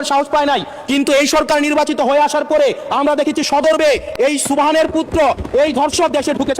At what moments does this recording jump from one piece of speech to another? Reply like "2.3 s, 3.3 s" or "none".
none